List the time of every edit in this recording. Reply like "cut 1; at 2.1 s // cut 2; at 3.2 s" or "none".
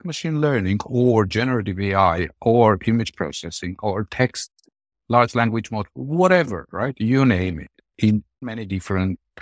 cut 1; at 8.4 s